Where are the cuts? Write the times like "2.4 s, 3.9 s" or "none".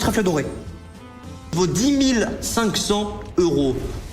1.5 s